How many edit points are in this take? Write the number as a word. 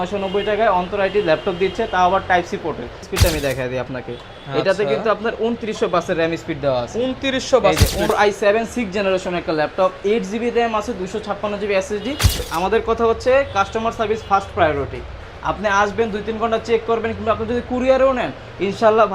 three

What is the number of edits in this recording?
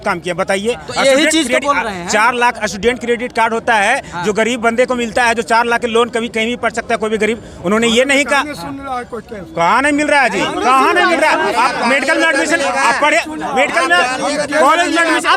zero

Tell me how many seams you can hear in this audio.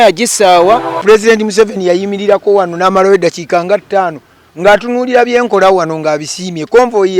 one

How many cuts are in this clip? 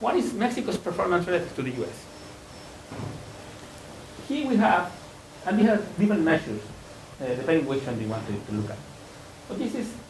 one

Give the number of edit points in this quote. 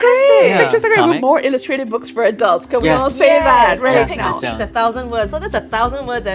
one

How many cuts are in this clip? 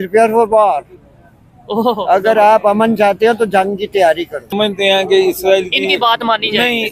one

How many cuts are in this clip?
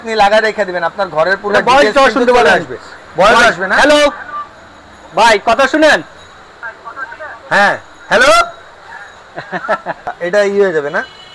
one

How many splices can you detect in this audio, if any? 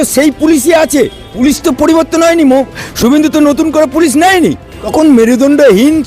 two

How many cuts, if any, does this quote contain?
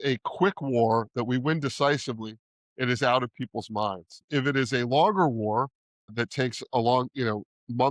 two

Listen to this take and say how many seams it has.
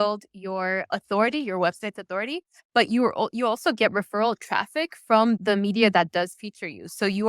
two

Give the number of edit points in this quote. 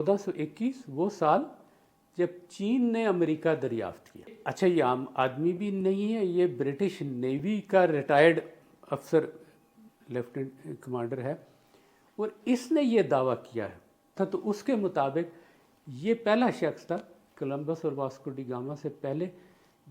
two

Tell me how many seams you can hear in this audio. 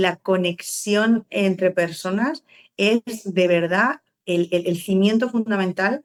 zero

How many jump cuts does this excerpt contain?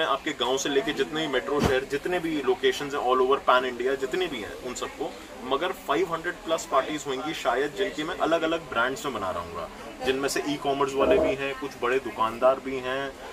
zero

